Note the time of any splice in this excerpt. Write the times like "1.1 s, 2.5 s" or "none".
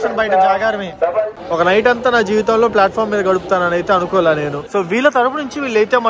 1.4 s, 4.6 s